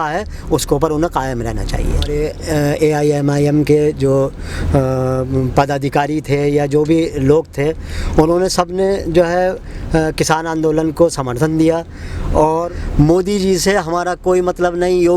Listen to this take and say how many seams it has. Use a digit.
2